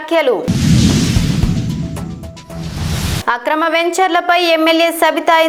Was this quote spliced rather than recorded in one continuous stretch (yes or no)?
no